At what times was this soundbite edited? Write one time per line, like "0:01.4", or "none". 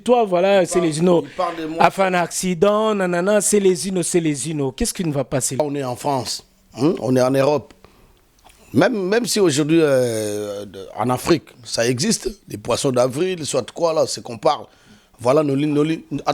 0:05.6

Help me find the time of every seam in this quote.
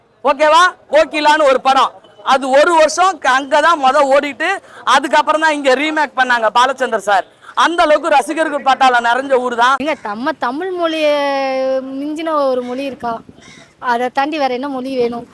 0:09.8

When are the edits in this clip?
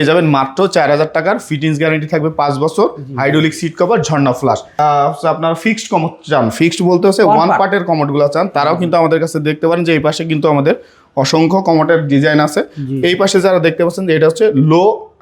0:04.7

